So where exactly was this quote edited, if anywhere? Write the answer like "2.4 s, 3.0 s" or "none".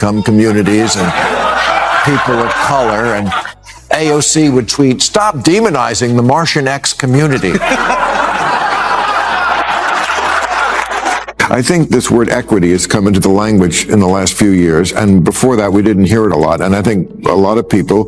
11.2 s